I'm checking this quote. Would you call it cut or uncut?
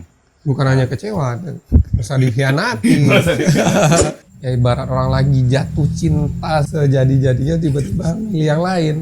cut